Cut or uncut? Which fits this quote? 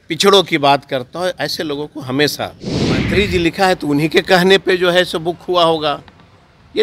cut